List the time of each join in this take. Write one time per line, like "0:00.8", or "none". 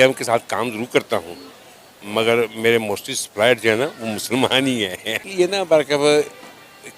0:05.2